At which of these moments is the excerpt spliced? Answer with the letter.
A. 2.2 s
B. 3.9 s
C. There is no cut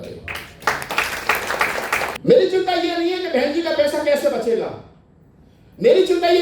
A